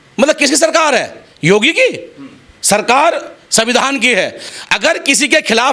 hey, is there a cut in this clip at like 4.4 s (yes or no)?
yes